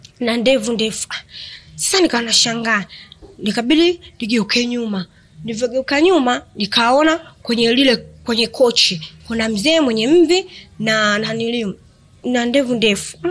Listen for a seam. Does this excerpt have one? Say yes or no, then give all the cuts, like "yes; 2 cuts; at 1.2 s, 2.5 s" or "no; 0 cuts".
no; 0 cuts